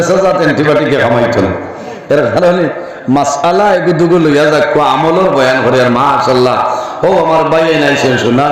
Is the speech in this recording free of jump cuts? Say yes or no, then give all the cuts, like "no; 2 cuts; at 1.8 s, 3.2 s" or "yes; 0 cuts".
yes; 0 cuts